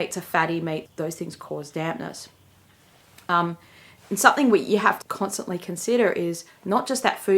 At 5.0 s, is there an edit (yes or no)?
yes